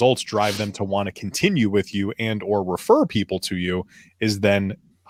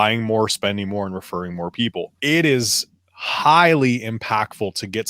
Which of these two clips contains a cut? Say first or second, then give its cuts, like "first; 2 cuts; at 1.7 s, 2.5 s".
second; 1 cut; at 2.1 s